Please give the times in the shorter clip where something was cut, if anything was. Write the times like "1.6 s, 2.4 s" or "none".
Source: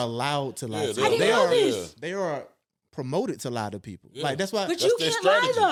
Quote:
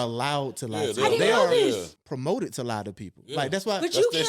1.9 s